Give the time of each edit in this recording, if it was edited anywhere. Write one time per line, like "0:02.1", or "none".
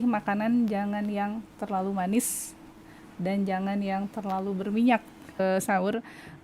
0:05.3